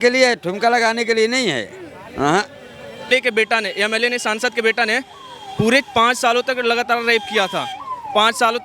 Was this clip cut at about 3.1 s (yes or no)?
yes